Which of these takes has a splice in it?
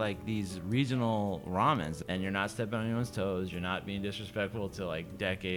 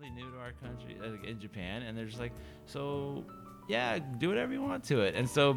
first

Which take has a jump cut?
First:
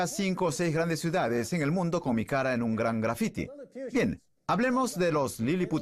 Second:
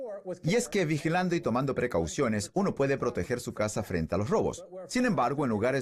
first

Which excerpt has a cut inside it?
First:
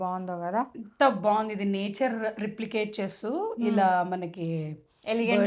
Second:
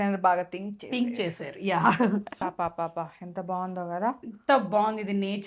second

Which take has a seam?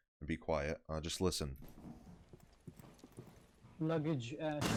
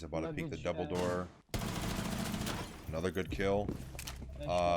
second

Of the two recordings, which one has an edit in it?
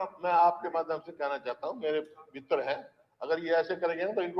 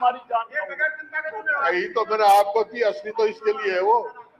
second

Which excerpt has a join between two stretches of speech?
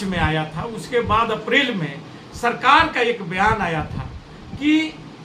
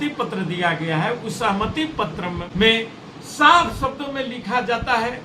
second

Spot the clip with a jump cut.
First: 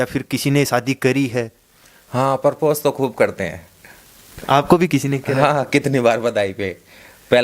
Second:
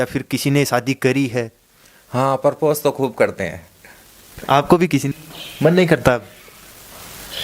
second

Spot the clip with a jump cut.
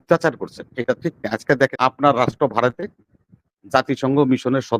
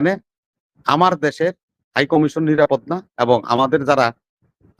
first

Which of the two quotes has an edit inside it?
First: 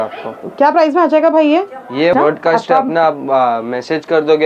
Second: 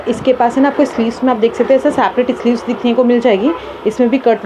first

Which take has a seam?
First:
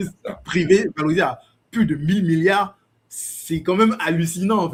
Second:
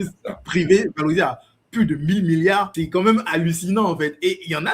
second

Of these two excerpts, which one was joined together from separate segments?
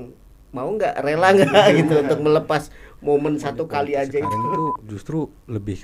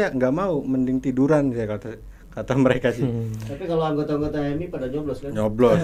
first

